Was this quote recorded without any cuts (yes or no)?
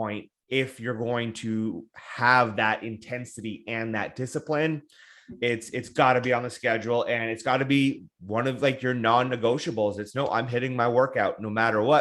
yes